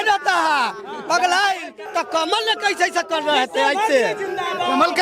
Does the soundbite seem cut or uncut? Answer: cut